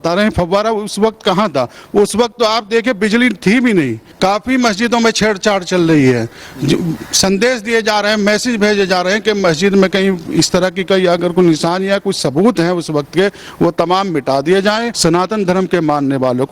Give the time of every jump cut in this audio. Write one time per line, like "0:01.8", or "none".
0:04.0
0:14.9